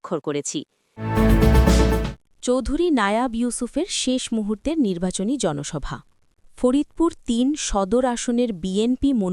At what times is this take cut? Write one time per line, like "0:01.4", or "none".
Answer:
0:00.9
0:02.2